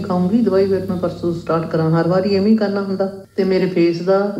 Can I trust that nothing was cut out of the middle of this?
no; 1 cut; at 3.2 s

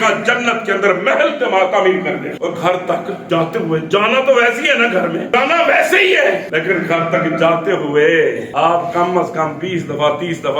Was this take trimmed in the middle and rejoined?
yes; 5 cuts; at 2.4 s, 3.2 s, 5.3 s, 6.5 s, 8.4 s

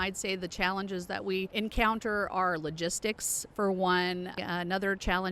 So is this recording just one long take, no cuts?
no; 2 cuts; at 1.5 s, 4.4 s

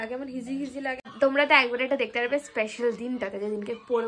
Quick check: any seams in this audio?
yes; 1 cut; at 1.1 s

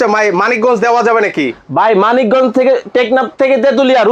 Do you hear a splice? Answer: no; 0 cuts

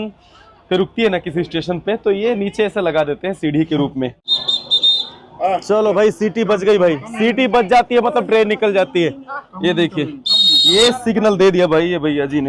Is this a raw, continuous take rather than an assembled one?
yes; 0 cuts

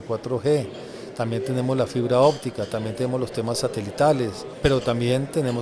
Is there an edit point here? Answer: yes; 1 cut; at 4.5 s

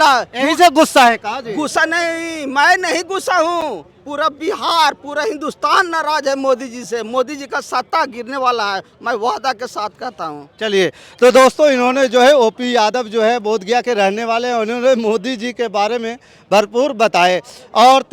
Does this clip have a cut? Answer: no; 0 cuts

